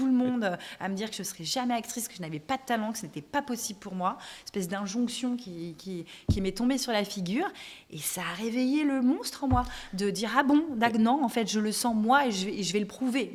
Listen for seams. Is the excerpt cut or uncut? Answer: uncut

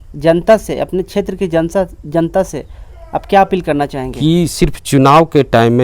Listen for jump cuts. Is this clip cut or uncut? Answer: cut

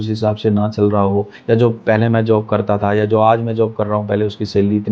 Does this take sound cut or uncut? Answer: cut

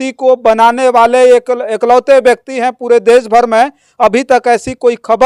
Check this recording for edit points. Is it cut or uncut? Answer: uncut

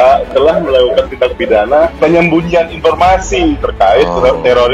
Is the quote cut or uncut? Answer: cut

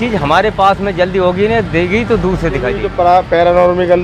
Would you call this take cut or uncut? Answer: cut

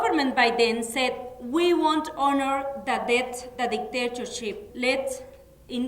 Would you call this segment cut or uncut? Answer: cut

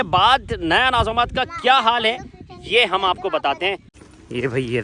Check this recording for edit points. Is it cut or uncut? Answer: cut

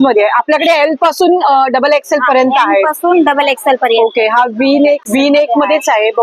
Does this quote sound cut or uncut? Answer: cut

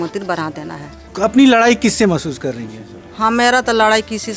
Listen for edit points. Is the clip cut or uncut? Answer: cut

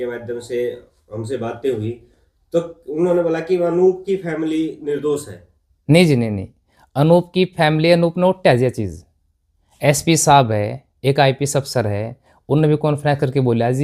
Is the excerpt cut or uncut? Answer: uncut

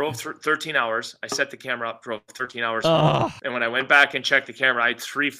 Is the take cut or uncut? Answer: cut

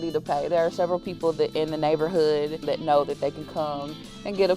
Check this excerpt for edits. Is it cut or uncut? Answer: cut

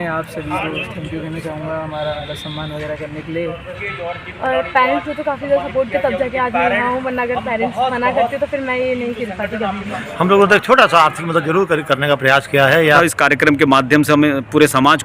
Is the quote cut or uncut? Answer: cut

